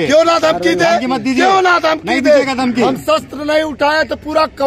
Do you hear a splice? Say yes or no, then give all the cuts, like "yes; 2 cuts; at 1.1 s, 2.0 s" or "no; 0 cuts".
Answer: no; 0 cuts